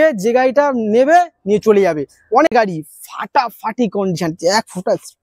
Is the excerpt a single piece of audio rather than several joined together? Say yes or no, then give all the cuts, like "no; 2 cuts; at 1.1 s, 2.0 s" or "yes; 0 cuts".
no; 1 cut; at 2.5 s